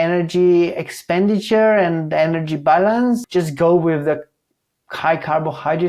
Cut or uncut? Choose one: cut